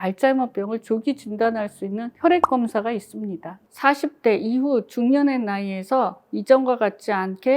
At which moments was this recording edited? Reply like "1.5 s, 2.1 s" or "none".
3.6 s